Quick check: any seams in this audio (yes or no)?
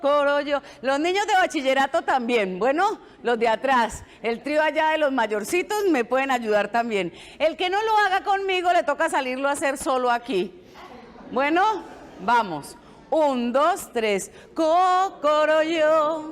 yes